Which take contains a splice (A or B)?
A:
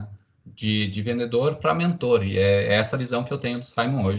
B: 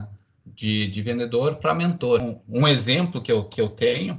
B